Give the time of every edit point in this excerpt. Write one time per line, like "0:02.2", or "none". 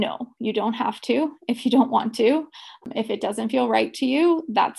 0:02.8